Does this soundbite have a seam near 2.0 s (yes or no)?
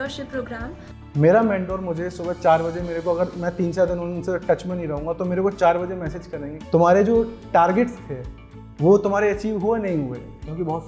no